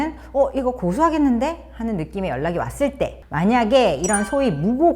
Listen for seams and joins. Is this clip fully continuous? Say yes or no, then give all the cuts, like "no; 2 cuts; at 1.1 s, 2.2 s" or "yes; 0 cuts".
no; 1 cut; at 3.2 s